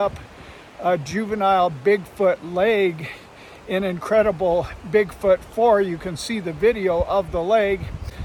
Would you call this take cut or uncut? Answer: uncut